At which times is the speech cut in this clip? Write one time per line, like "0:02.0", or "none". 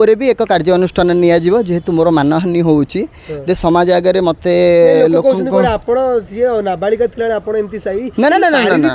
none

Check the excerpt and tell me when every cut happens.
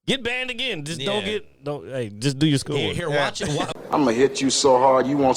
0:03.9

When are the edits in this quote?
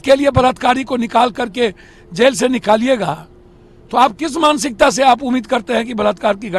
none

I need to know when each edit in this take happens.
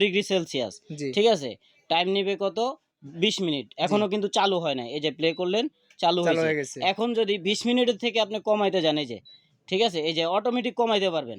none

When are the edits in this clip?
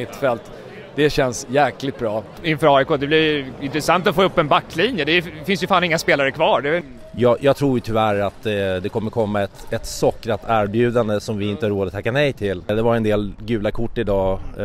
0:02.3
0:06.8
0:12.7

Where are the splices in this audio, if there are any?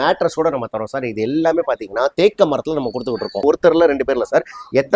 0:03.4

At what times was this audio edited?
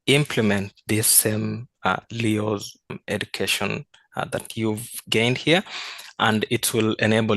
0:03.0

